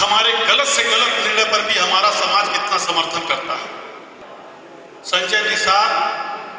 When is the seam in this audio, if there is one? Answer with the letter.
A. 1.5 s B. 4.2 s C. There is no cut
B